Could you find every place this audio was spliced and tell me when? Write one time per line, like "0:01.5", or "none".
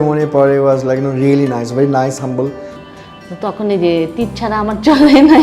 0:02.7